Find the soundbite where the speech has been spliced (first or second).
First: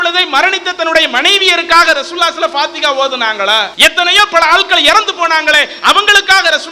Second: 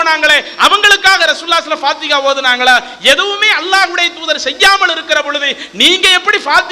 first